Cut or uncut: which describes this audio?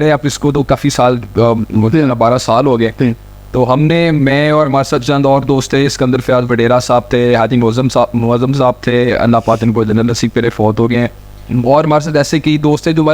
uncut